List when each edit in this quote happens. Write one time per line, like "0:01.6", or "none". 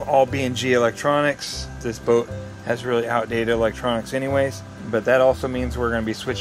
0:01.9
0:04.7